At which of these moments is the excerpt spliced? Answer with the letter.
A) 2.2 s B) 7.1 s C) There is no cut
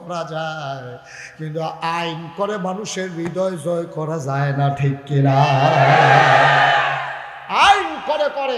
C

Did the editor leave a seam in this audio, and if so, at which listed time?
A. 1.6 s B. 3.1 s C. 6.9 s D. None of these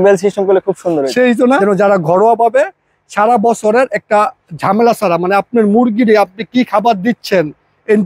A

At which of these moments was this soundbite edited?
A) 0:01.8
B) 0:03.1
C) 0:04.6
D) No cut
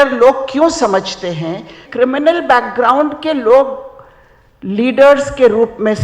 A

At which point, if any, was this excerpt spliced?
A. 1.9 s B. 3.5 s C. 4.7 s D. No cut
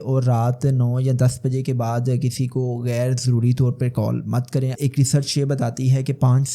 C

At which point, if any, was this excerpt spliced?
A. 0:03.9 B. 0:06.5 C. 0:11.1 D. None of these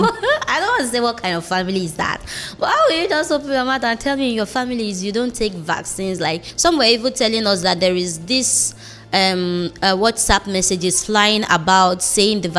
B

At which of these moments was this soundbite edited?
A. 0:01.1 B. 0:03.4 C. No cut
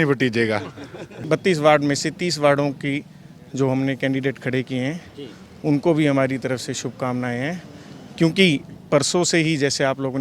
A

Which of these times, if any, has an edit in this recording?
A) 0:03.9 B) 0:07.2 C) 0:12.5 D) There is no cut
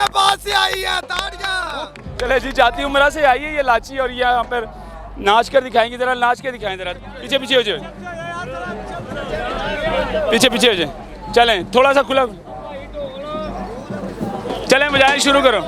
D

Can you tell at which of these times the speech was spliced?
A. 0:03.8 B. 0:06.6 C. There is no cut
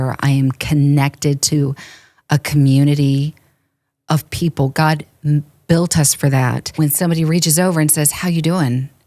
B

